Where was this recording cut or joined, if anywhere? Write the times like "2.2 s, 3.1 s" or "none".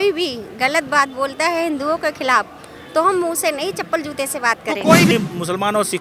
5.1 s

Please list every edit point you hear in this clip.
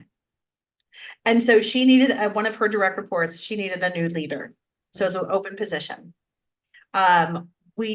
none

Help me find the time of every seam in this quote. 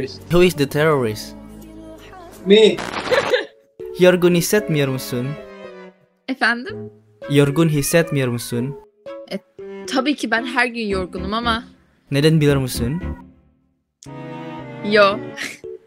2.9 s

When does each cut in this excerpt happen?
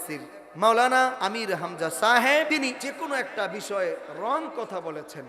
1.2 s, 2.7 s

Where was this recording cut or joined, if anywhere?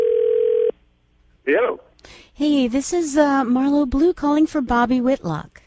none

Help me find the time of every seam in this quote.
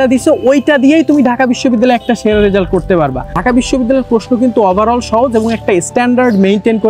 3.3 s

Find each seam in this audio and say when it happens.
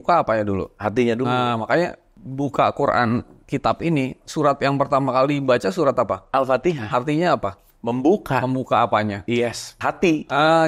9.7 s

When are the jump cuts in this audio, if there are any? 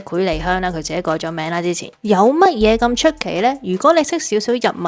1.9 s

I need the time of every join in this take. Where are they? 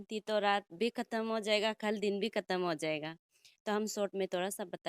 none

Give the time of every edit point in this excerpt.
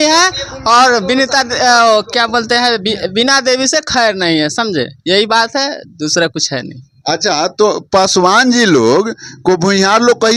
none

